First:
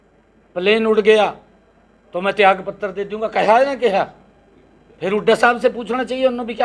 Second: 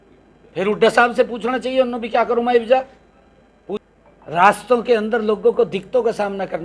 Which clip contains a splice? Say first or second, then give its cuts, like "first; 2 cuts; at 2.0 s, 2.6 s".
second; 1 cut; at 3.8 s